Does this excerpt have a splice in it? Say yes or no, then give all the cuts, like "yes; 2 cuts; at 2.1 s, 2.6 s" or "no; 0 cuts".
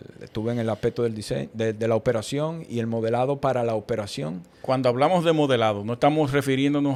no; 0 cuts